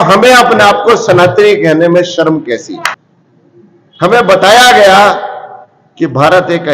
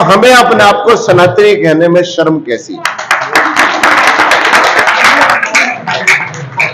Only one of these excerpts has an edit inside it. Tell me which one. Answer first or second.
first